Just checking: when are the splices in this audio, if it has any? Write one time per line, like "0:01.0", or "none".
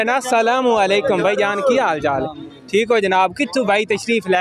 none